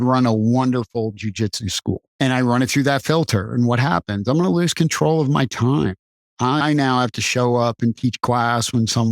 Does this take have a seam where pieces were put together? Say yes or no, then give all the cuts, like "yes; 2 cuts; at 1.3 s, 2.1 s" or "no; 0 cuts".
yes; 1 cut; at 2.1 s